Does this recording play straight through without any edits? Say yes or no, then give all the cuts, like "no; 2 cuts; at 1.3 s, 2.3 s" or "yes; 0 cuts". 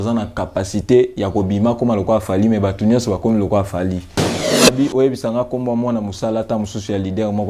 no; 1 cut; at 4.4 s